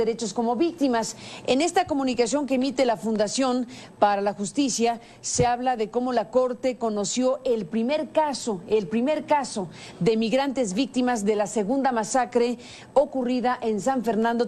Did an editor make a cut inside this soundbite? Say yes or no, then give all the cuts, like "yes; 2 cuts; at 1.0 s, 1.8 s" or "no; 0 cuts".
no; 0 cuts